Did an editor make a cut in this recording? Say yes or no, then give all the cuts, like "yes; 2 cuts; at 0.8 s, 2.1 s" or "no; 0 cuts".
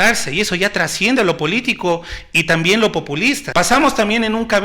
yes; 1 cut; at 3.4 s